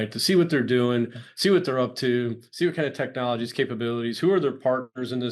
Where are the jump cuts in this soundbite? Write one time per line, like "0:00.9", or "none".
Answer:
none